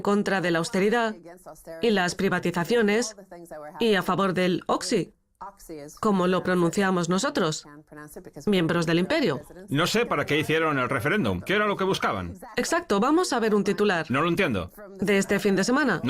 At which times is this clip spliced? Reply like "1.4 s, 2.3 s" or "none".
1.7 s